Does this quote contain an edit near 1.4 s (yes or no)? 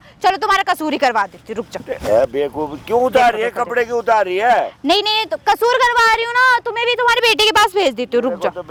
no